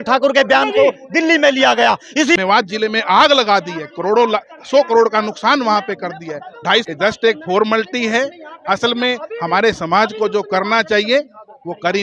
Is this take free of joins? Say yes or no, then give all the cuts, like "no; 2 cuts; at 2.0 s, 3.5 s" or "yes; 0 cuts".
no; 2 cuts; at 2.4 s, 6.9 s